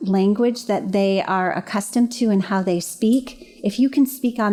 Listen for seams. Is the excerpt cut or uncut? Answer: uncut